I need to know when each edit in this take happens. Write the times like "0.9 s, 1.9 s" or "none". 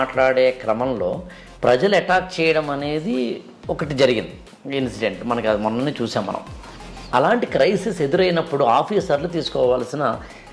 7.0 s

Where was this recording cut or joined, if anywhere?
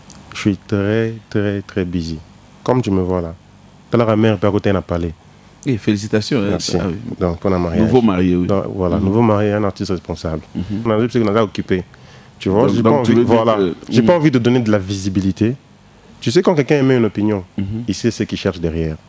10.9 s

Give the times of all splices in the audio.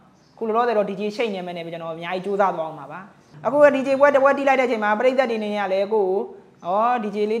3.2 s

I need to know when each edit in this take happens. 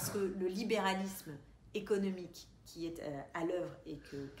none

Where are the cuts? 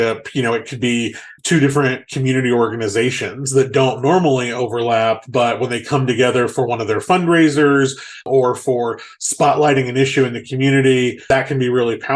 1.2 s, 8.2 s, 11.2 s

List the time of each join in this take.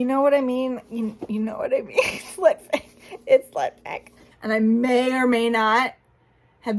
4.3 s

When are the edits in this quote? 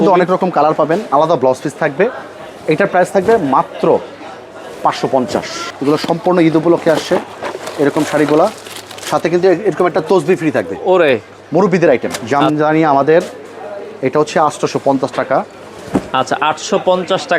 1.0 s, 5.6 s, 12.2 s

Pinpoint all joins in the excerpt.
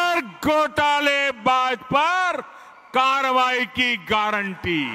none

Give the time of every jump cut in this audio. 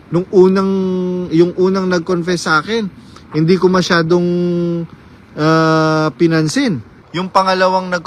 7.0 s

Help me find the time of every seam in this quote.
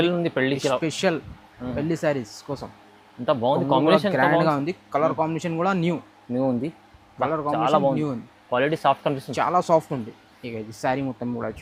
none

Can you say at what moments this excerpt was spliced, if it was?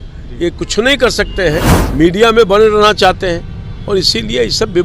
1.8 s

